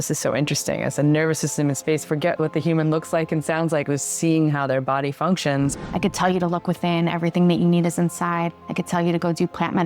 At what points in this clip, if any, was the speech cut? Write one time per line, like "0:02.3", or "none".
0:02.4
0:05.8
0:08.6